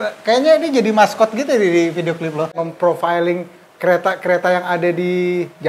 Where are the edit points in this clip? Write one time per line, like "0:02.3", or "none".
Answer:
0:02.6